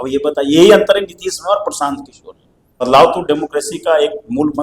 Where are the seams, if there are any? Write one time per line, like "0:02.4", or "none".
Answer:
0:02.8